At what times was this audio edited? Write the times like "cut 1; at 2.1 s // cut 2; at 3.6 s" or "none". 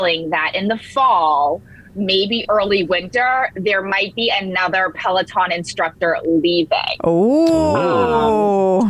none